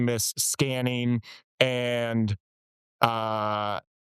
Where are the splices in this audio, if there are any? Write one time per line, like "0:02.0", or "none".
none